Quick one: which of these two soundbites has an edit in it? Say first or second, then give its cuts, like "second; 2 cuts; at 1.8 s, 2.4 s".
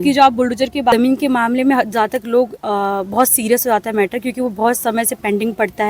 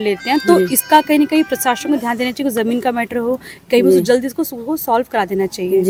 first; 1 cut; at 0.9 s